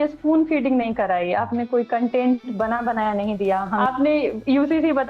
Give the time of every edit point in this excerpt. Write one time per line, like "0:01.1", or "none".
0:03.8